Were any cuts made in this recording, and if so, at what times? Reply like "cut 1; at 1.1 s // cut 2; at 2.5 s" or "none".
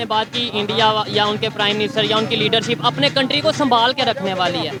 none